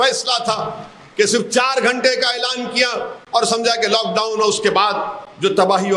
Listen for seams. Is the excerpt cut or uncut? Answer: uncut